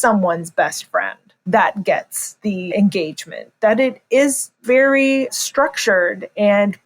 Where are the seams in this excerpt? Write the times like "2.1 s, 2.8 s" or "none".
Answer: 2.7 s, 4.6 s